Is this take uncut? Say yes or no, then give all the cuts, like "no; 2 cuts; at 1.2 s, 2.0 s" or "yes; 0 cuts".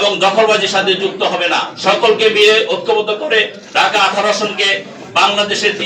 no; 2 cuts; at 1.7 s, 3.6 s